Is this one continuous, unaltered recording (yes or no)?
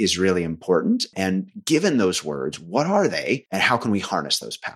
no